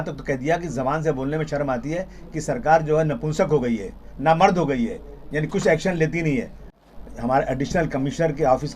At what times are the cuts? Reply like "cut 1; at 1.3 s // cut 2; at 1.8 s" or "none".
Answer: cut 1; at 6.6 s